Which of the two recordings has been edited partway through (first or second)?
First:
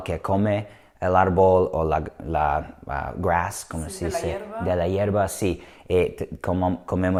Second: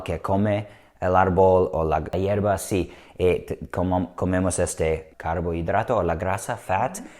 second